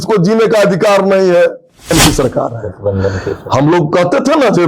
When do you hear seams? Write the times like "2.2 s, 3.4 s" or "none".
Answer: 1.9 s